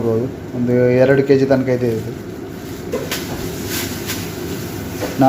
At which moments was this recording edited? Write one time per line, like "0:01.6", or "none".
none